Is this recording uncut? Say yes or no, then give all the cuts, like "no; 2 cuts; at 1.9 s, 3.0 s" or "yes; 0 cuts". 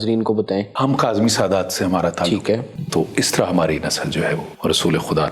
no; 3 cuts; at 0.8 s, 2.8 s, 4.5 s